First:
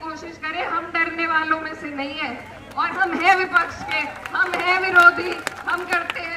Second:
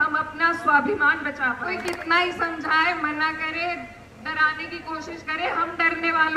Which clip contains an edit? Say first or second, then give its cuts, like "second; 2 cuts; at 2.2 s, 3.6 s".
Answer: second; 1 cut; at 1.8 s